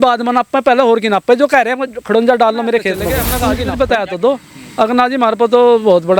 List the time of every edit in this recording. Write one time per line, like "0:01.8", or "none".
0:03.2